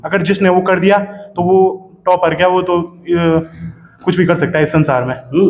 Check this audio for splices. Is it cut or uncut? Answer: uncut